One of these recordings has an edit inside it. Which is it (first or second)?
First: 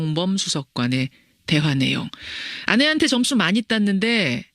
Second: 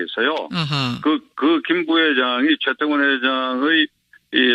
first